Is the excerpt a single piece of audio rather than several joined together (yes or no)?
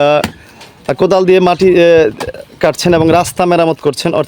yes